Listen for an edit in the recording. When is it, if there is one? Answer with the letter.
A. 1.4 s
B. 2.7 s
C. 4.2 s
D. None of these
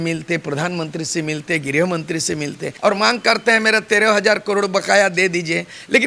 B